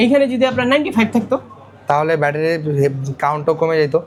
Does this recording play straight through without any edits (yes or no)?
yes